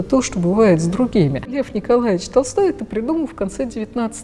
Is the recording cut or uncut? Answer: cut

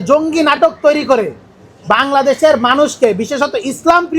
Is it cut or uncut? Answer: uncut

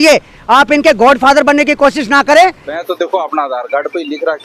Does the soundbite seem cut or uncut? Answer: cut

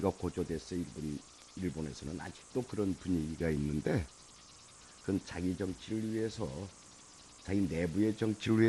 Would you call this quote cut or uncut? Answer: cut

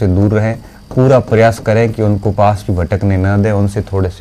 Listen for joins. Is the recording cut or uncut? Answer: uncut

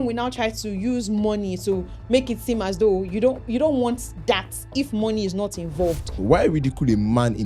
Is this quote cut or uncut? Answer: cut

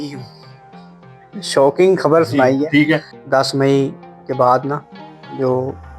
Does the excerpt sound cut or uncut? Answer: cut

